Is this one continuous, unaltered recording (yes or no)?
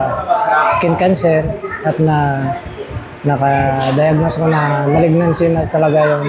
yes